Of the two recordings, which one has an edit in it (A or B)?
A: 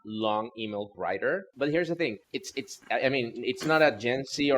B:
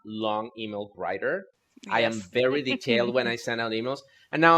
A